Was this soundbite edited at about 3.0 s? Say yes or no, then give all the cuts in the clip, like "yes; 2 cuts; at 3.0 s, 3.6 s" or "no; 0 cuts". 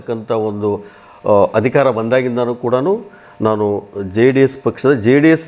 no; 0 cuts